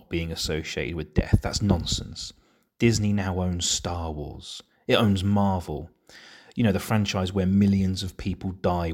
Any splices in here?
no; 0 cuts

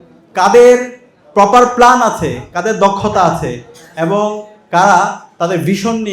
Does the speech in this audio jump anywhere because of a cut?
no; 0 cuts

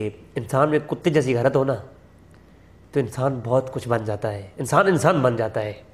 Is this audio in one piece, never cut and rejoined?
yes; 0 cuts

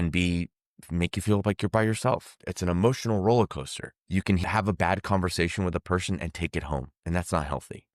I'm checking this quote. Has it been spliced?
yes; 1 cut; at 2.3 s

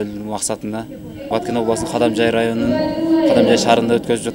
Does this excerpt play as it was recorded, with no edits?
no; 1 cut; at 1.3 s

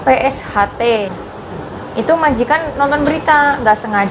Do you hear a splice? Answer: yes; 1 cut; at 1.3 s

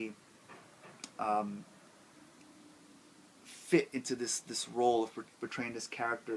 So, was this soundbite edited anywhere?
yes; 1 cut; at 1.6 s

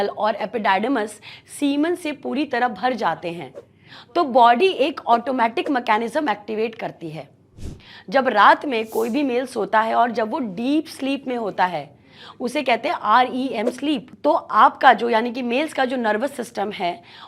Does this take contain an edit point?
no; 0 cuts

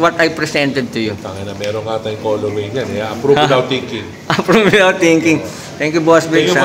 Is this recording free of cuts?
yes; 0 cuts

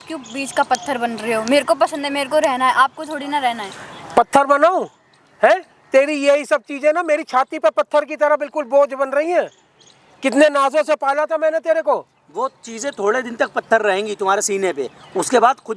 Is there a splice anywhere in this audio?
no; 0 cuts

